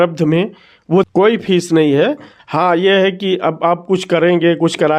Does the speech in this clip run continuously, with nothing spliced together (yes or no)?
no